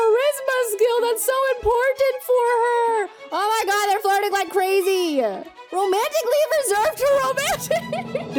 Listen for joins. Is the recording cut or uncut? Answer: uncut